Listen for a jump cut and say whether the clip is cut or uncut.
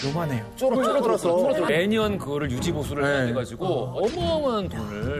cut